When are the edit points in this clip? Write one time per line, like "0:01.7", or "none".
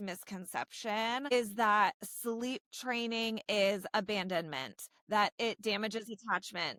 none